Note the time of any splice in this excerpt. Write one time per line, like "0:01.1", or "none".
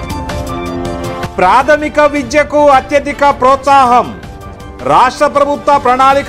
0:01.1